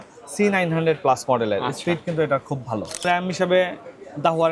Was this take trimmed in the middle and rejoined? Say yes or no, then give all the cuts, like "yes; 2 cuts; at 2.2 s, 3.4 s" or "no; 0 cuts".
yes; 1 cut; at 3.0 s